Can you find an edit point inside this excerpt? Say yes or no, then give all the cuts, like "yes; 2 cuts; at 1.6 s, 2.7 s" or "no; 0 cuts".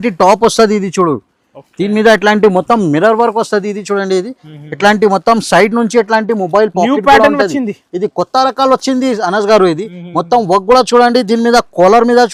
no; 0 cuts